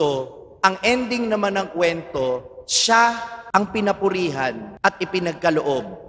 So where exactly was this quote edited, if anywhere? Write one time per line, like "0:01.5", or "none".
0:03.3
0:04.7